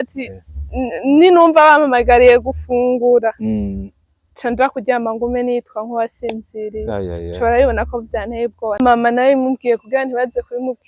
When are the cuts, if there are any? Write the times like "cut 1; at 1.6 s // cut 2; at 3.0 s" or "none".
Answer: cut 1; at 8.8 s